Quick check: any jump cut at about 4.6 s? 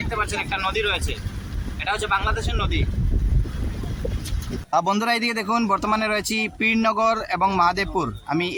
no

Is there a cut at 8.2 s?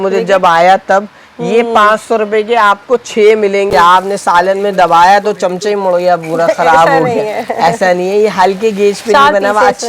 no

